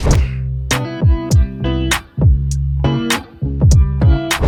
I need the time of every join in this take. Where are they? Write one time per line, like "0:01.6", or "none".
none